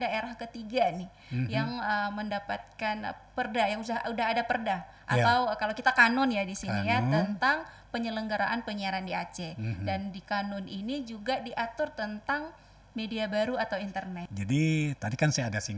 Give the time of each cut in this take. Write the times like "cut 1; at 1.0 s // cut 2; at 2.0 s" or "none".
cut 1; at 14.2 s